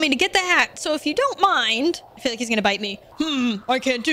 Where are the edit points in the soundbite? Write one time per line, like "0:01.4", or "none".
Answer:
0:02.1
0:03.0